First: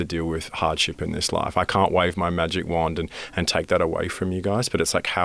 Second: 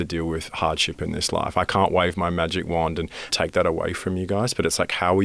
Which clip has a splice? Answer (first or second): second